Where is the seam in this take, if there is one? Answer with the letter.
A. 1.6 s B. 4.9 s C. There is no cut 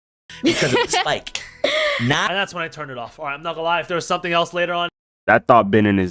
B